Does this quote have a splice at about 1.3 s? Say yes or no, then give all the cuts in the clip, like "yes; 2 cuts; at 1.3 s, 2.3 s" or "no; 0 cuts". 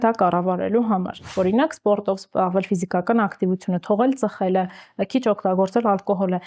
yes; 1 cut; at 1.3 s